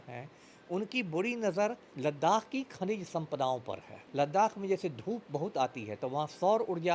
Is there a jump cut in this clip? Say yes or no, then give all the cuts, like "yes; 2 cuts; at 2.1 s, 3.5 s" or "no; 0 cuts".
yes; 2 cuts; at 1.9 s, 3.9 s